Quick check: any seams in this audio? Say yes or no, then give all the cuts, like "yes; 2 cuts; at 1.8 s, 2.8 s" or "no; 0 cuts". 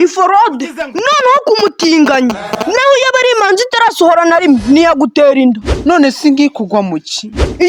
no; 0 cuts